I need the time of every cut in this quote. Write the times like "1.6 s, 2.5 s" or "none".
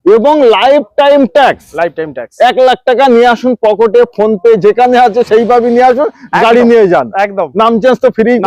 none